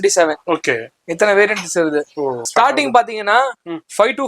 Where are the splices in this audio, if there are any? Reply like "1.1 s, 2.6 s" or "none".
2.4 s